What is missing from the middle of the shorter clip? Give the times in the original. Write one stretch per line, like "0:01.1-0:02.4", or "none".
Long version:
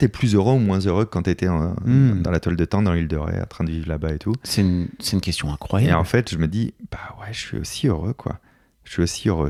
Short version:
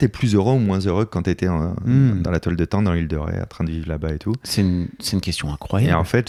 none